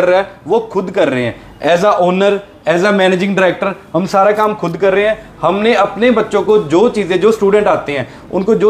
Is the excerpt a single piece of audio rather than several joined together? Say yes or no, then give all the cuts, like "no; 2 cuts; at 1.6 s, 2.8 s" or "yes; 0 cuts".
yes; 0 cuts